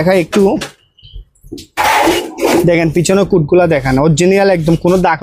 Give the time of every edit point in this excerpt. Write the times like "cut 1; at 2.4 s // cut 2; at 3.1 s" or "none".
none

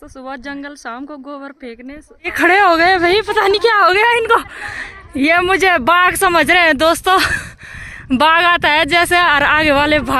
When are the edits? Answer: cut 1; at 2.3 s

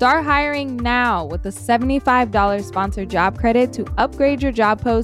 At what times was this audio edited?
none

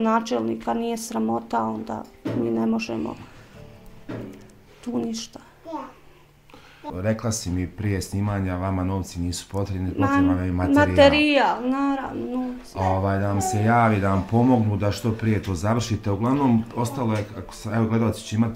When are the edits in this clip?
cut 1; at 6.9 s

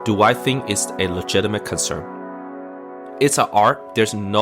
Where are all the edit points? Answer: cut 1; at 2.6 s

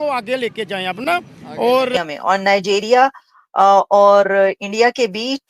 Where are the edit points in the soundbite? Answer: cut 1; at 1.9 s

